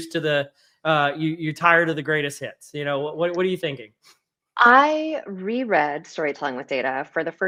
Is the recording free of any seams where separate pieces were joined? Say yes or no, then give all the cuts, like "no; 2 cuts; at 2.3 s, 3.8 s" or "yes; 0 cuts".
yes; 0 cuts